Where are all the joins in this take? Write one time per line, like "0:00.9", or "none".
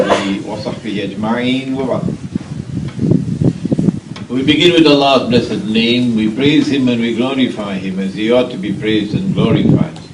none